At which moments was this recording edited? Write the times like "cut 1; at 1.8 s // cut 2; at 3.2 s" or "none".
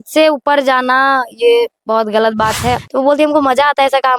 cut 1; at 2.8 s